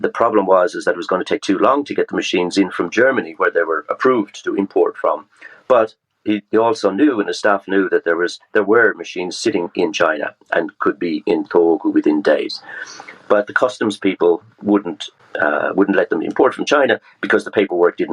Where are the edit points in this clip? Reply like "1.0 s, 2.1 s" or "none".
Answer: 15.1 s